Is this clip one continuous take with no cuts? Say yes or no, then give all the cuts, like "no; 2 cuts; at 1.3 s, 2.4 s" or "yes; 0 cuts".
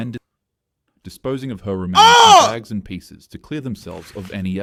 yes; 0 cuts